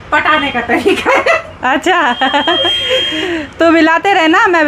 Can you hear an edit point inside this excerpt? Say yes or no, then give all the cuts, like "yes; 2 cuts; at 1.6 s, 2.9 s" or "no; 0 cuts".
no; 0 cuts